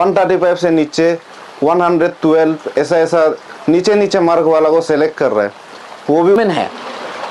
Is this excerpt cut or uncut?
cut